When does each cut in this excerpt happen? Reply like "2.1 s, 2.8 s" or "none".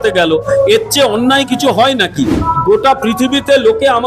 2.5 s